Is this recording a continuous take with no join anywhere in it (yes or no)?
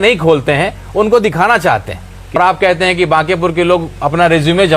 no